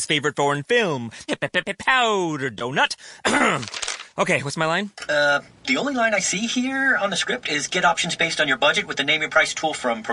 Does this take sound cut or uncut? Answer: uncut